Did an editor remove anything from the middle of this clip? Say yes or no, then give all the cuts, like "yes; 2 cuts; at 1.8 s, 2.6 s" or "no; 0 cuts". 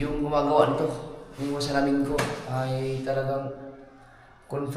no; 0 cuts